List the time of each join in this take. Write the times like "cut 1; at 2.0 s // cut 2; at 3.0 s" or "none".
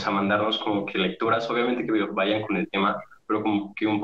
none